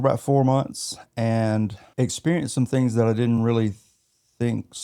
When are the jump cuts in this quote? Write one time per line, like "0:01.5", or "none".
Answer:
0:01.8